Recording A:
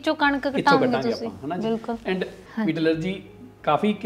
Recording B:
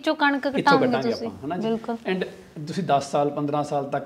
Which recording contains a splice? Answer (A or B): A